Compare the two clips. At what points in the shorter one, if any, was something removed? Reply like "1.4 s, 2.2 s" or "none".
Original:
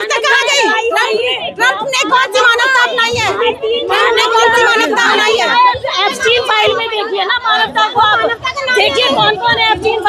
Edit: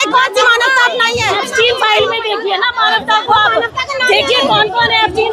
1.4 s

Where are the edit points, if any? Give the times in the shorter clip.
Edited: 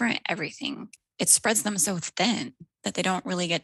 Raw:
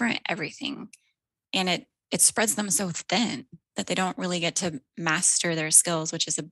1.0 s

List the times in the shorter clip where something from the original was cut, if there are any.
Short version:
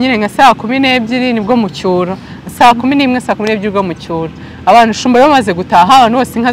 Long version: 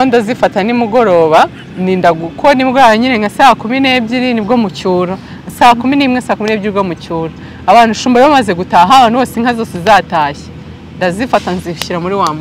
none

